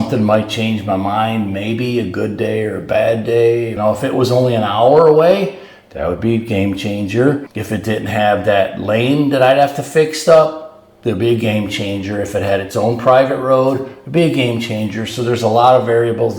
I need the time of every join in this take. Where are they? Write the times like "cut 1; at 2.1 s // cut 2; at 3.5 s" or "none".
cut 1; at 3.7 s // cut 2; at 7.5 s